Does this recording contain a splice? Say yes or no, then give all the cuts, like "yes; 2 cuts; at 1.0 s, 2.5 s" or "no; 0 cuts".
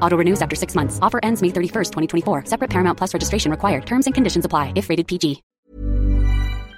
yes; 1 cut; at 5.5 s